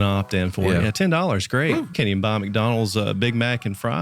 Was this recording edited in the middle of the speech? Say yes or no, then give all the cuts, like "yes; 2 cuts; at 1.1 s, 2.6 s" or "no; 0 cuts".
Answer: yes; 1 cut; at 1.9 s